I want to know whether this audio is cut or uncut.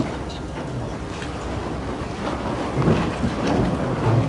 uncut